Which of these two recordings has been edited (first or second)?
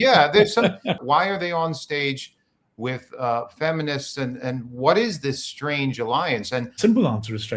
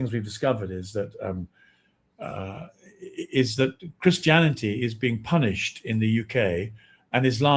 first